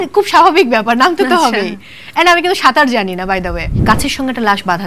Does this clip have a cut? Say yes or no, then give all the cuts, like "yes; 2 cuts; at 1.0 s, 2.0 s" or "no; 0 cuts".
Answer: yes; 1 cut; at 3.8 s